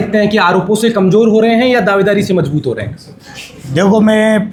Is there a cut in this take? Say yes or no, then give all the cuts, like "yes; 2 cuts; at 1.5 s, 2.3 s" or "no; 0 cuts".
no; 0 cuts